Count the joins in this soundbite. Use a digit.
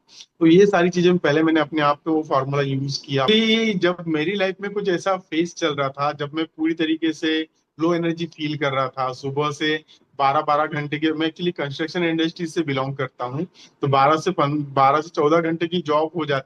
1